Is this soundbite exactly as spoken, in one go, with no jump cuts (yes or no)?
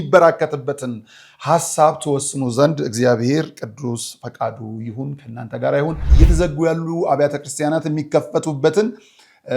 no